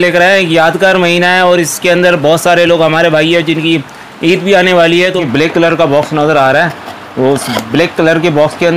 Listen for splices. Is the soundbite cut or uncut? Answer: cut